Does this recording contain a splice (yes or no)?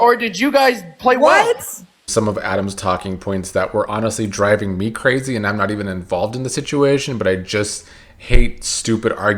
yes